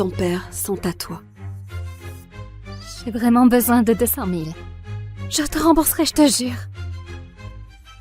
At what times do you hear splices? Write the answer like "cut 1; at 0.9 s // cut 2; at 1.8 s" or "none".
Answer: cut 1; at 1.2 s // cut 2; at 3.0 s // cut 3; at 6.6 s